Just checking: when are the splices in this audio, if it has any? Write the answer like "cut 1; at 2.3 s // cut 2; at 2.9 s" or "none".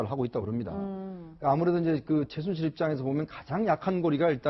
cut 1; at 2.8 s

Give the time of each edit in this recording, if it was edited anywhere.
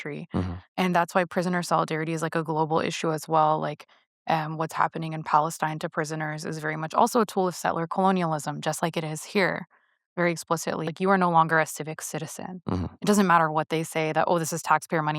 cut 1; at 10.9 s

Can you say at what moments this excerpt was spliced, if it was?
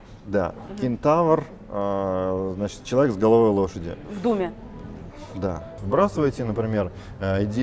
cut 1; at 5.8 s

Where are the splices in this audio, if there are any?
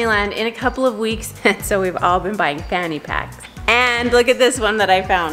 cut 1; at 1.3 s // cut 2; at 3.5 s

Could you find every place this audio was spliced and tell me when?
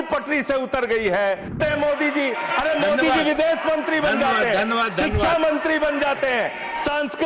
cut 1; at 1.6 s

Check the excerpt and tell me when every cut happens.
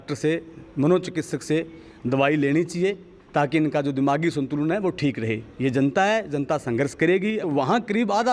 cut 1; at 7.4 s

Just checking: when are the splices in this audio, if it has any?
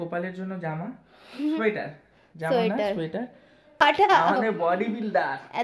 cut 1; at 3.8 s

